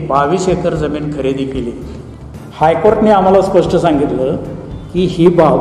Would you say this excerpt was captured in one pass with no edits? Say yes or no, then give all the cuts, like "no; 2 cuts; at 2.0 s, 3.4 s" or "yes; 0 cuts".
no; 1 cut; at 1.9 s